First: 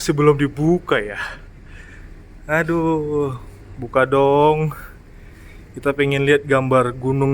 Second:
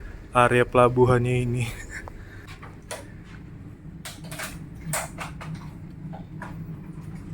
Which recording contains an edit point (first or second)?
second